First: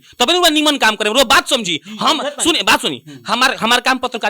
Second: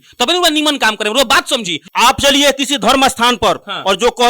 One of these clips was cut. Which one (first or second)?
second